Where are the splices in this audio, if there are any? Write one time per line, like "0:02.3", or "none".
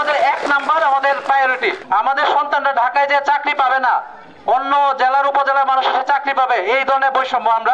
none